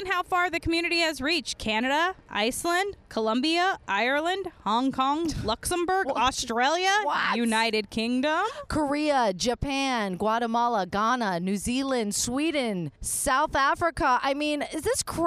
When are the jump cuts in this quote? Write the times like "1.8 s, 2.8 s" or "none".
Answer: none